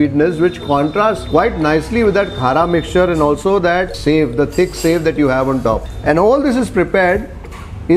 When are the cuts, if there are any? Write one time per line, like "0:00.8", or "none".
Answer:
0:03.9
0:05.9